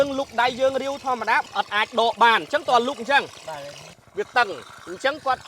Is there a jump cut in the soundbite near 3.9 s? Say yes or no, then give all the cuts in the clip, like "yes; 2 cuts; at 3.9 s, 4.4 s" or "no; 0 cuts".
yes; 1 cut; at 3.9 s